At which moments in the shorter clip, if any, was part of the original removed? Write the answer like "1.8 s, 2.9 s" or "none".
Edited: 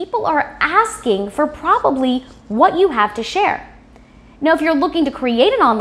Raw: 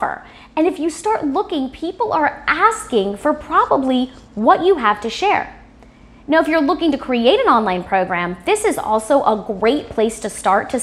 none